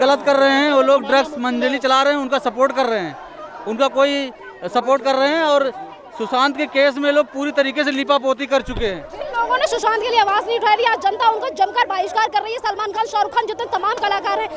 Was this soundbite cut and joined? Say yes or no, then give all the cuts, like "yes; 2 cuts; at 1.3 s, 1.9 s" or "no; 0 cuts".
no; 0 cuts